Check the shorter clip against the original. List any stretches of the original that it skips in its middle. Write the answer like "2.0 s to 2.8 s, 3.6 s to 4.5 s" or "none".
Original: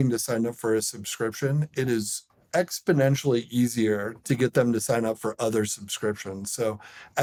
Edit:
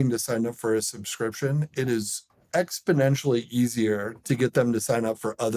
none